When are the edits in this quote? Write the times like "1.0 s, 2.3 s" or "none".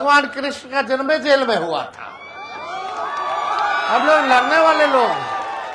none